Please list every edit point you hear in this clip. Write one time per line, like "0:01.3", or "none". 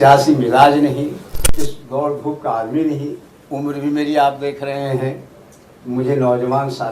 0:01.4